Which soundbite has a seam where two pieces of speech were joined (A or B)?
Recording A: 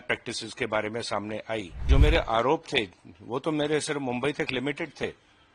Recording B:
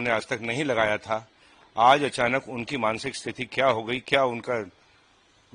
A